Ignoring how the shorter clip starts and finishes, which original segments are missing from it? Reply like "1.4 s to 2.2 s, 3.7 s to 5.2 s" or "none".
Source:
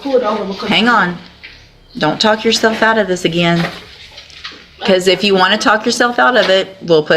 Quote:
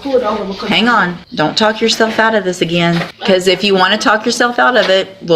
1.2 s to 1.8 s, 3.8 s to 4.7 s